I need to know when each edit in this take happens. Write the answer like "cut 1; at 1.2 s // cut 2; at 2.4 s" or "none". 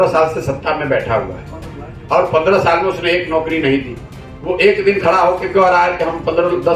none